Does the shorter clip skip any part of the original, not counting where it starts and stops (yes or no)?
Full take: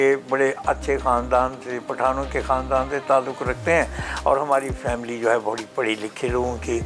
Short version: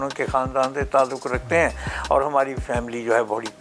no